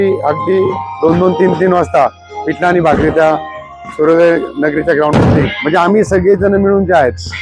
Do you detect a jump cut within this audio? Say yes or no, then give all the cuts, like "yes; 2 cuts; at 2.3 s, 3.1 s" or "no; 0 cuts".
yes; 1 cut; at 5.5 s